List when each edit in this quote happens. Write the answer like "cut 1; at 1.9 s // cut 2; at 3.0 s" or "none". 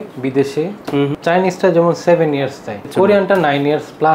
cut 1; at 1.1 s // cut 2; at 2.9 s